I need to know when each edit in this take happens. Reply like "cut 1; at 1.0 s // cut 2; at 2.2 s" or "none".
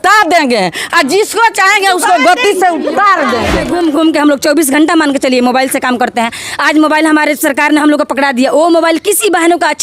cut 1; at 3.6 s

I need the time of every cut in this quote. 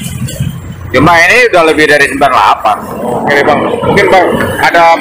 cut 1; at 3.1 s

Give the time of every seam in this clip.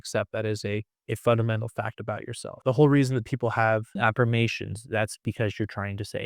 cut 1; at 0.9 s // cut 2; at 2.6 s // cut 3; at 3.9 s

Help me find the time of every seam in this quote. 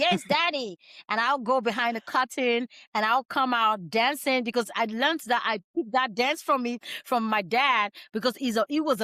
none

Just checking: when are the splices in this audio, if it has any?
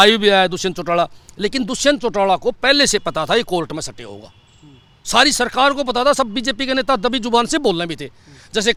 none

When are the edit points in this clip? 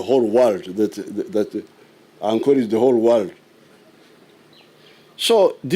cut 1; at 4.5 s

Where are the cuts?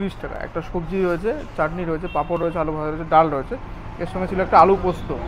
none

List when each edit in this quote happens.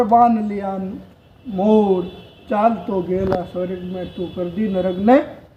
none

